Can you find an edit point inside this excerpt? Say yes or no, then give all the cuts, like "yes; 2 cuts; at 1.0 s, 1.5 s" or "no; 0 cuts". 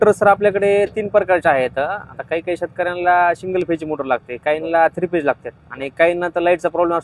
no; 0 cuts